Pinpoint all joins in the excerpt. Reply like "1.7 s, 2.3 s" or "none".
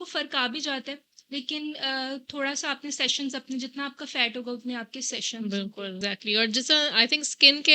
6.0 s